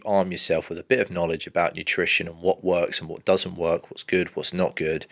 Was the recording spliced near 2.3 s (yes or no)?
no